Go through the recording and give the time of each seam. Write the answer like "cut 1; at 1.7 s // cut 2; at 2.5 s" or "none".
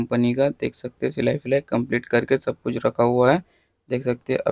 none